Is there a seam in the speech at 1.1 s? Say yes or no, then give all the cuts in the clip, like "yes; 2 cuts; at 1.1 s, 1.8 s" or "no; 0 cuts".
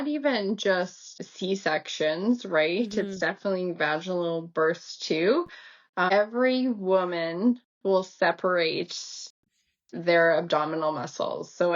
yes; 2 cuts; at 1.1 s, 6.1 s